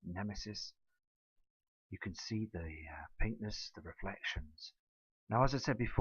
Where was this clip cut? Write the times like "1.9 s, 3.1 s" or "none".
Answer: 1.3 s